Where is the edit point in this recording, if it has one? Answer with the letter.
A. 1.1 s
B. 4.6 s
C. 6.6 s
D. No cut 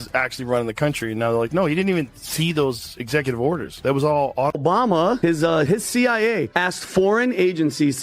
B